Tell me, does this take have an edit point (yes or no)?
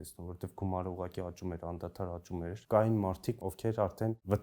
yes